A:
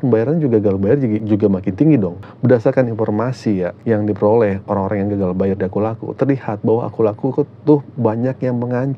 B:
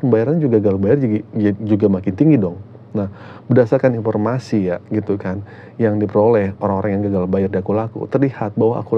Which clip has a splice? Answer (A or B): A